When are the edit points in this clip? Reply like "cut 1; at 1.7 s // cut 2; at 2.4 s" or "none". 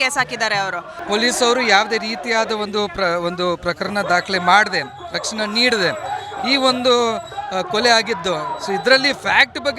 cut 1; at 1.0 s